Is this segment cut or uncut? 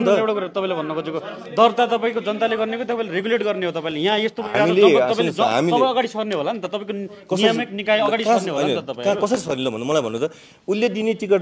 uncut